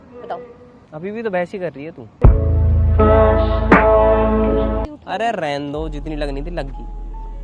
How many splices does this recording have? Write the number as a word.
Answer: one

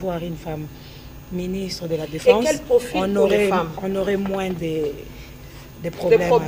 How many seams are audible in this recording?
zero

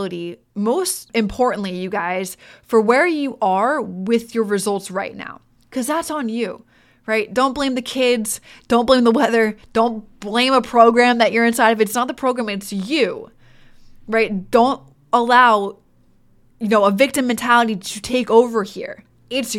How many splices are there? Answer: one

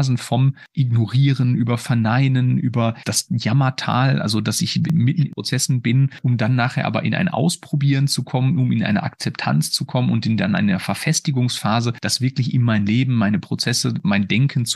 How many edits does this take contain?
four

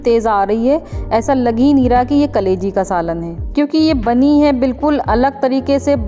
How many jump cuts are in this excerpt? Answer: one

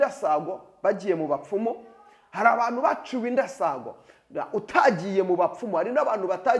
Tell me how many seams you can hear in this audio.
zero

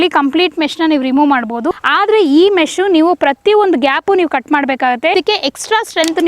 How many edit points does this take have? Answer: two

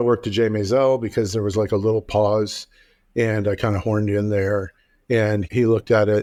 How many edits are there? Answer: zero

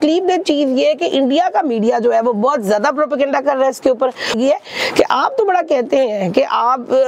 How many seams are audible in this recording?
one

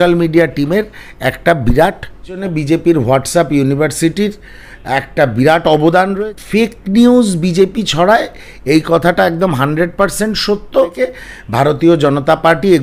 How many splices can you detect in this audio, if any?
three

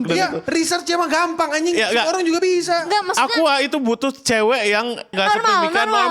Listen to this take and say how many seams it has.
one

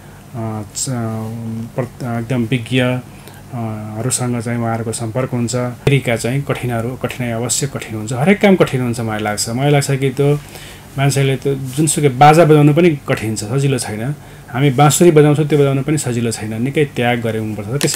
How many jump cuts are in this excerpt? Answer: one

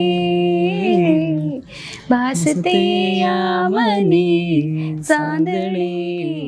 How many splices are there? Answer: zero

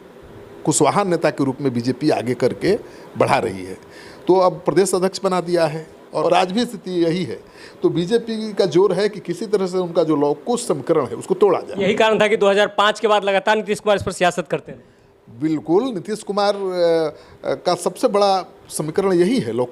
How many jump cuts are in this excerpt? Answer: one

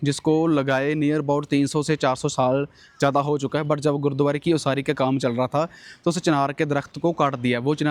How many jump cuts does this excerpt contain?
zero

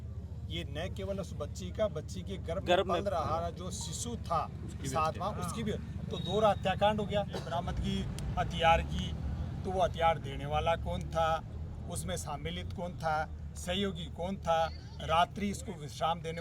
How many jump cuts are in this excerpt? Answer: one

